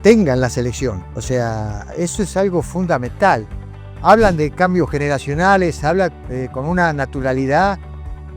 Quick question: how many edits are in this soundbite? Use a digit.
1